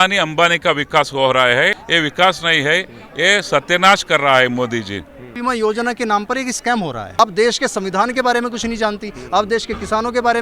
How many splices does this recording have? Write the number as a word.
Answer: three